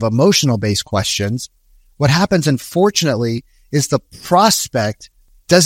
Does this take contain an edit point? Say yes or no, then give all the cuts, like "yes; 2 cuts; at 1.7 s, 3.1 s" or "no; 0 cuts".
no; 0 cuts